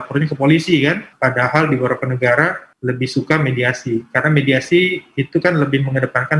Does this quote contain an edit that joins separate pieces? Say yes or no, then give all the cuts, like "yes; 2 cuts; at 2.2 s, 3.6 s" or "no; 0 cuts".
yes; 2 cuts; at 1.1 s, 2.7 s